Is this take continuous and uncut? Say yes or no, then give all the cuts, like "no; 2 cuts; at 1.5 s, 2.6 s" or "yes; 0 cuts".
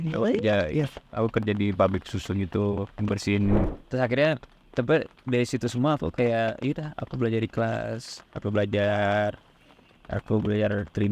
no; 1 cut; at 3.8 s